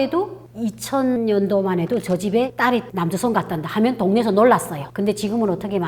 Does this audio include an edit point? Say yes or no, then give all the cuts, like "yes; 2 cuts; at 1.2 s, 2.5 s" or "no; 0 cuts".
yes; 2 cuts; at 1.2 s, 4.8 s